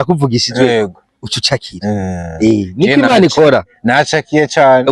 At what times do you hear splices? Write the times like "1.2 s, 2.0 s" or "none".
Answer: none